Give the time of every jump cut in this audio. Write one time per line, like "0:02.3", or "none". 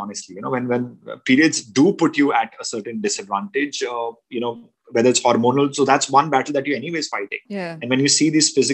none